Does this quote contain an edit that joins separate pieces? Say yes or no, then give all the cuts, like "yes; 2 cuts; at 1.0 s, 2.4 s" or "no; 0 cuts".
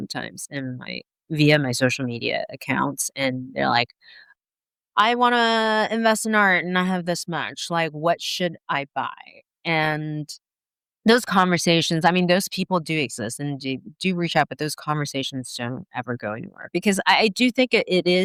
no; 0 cuts